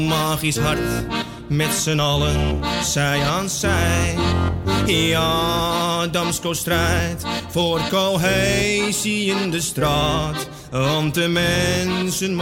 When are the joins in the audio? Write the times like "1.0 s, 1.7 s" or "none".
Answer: none